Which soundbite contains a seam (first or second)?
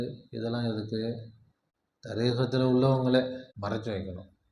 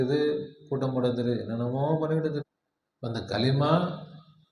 first